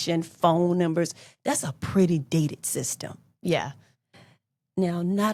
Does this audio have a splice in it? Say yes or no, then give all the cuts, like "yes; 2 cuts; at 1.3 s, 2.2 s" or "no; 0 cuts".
no; 0 cuts